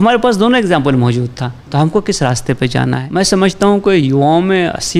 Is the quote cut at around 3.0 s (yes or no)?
yes